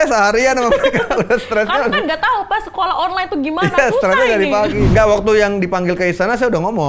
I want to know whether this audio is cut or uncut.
cut